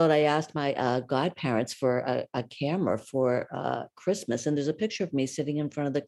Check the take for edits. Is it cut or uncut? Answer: uncut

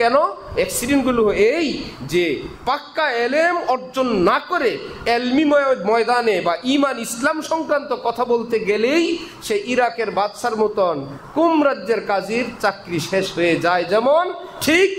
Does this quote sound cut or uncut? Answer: uncut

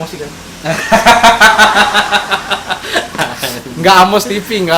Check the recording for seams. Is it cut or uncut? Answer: uncut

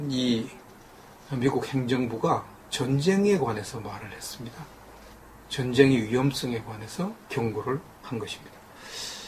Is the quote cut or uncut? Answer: uncut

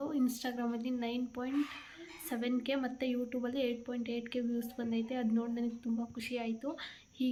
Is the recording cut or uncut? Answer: uncut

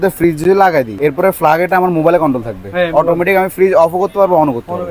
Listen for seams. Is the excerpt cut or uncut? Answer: cut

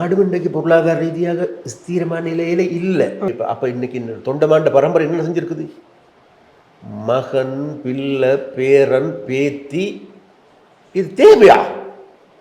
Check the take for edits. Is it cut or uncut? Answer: cut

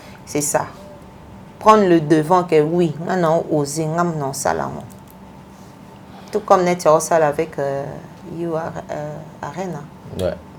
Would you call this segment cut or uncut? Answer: uncut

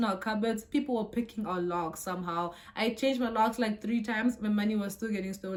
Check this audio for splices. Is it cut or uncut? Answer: uncut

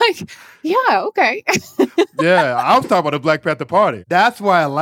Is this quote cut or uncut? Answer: cut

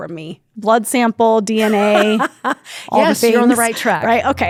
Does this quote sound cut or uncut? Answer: uncut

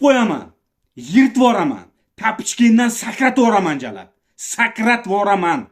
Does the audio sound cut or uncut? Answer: uncut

